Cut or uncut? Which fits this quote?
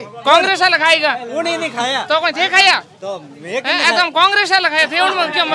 uncut